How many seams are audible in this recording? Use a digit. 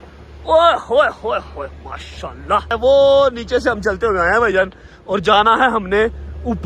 1